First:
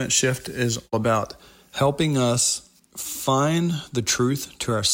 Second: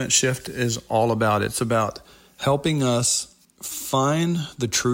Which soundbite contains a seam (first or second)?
first